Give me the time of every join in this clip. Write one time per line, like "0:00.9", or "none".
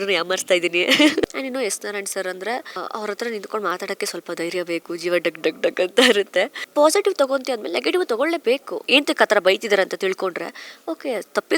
0:01.2
0:02.8
0:06.6
0:08.8